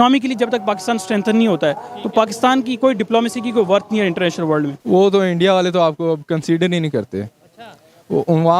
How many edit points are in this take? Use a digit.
1